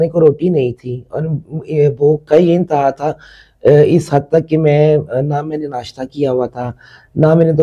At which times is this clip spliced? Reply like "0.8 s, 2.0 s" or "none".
none